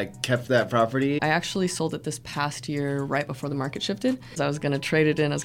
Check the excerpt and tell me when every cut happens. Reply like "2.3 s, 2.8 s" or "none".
1.2 s, 4.3 s